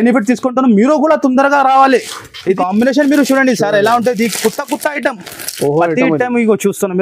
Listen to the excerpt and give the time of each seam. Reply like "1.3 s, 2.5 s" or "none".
2.6 s